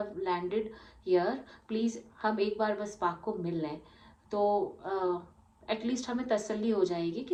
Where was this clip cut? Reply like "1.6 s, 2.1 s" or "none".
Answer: none